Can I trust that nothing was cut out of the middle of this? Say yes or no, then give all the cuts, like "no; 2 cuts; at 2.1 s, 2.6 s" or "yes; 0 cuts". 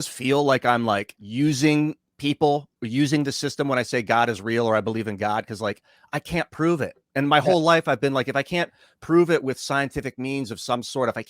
no; 1 cut; at 1.2 s